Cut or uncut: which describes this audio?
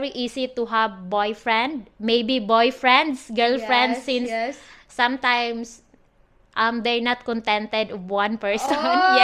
uncut